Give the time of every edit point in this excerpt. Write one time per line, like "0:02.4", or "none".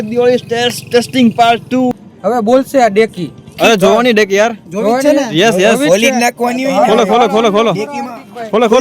0:02.1
0:03.5